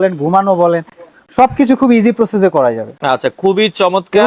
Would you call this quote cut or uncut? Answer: uncut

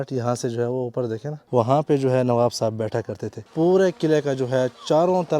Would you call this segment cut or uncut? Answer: cut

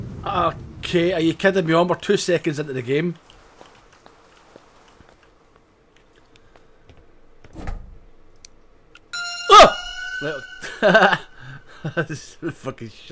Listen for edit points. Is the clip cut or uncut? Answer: uncut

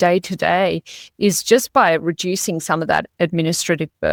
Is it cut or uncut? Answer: uncut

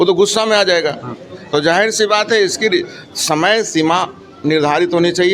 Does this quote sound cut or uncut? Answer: uncut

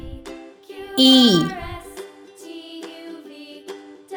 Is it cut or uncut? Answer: uncut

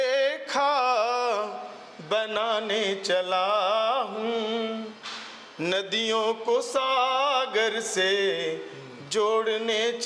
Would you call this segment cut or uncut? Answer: uncut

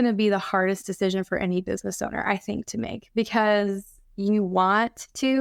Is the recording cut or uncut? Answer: uncut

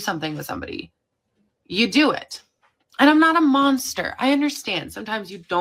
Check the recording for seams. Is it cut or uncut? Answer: uncut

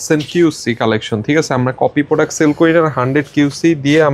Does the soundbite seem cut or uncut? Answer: uncut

